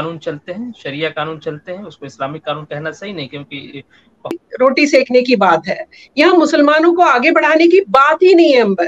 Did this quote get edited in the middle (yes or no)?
yes